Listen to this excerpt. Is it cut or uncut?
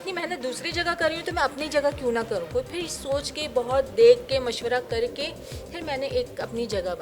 uncut